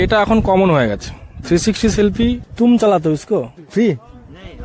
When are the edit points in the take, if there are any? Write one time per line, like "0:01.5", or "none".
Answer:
0:02.5
0:03.6